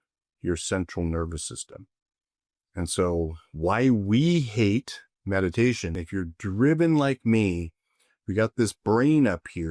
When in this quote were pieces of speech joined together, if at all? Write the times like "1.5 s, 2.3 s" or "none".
5.9 s